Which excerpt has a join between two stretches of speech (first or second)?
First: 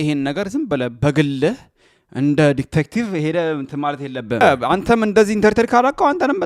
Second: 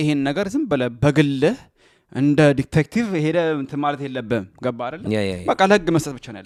first